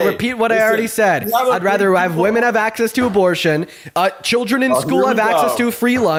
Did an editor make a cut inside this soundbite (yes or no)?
no